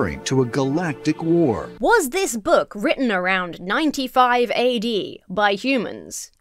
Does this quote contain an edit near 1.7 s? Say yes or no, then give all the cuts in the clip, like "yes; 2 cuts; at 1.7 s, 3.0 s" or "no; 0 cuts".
yes; 1 cut; at 1.7 s